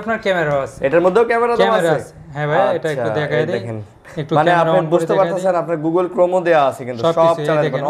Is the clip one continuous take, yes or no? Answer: yes